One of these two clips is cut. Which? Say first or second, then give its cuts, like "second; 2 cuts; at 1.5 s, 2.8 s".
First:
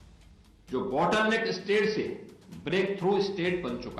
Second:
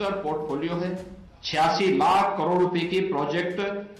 second; 1 cut; at 1.6 s